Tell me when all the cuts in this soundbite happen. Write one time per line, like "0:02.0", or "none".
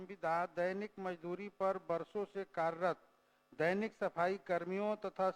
none